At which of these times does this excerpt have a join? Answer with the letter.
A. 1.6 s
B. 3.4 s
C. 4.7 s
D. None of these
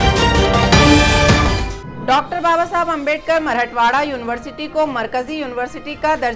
A